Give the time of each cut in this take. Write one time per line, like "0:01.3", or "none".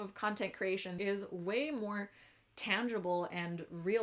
0:00.9